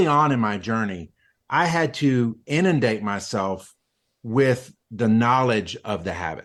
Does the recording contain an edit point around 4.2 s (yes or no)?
no